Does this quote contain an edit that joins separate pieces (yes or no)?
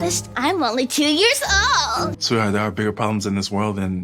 yes